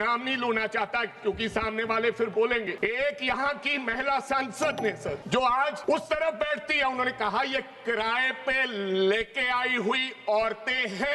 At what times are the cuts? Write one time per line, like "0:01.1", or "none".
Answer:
0:02.7
0:05.2
0:05.8